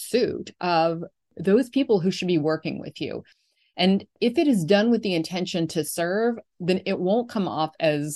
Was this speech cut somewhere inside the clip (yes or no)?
no